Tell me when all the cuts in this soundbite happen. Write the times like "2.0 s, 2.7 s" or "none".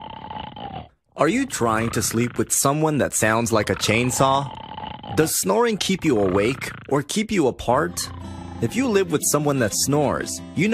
none